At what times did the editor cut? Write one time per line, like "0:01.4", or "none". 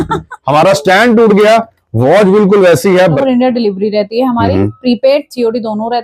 0:03.2